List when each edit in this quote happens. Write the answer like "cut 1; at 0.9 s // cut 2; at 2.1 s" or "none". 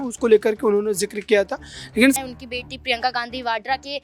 cut 1; at 2.2 s